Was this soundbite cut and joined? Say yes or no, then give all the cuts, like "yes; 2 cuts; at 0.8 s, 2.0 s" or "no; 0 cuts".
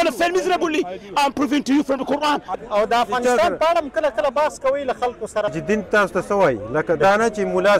yes; 2 cuts; at 2.5 s, 5.5 s